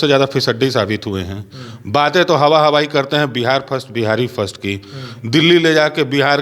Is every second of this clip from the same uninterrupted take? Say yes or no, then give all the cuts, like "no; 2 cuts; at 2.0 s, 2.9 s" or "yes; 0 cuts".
yes; 0 cuts